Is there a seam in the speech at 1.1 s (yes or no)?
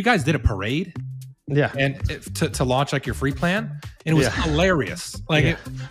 yes